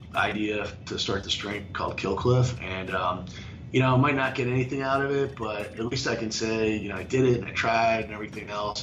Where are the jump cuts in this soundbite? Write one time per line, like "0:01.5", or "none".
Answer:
none